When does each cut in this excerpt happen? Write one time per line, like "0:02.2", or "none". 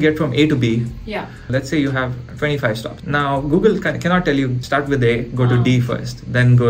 0:01.4
0:02.9
0:04.6